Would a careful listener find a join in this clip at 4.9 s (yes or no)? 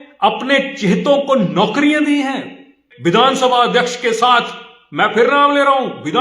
no